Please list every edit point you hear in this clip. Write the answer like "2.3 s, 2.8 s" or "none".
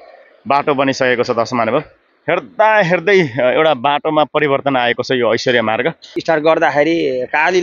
6.1 s